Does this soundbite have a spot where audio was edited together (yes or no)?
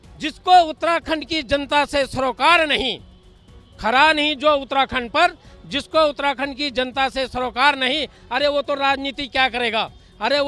no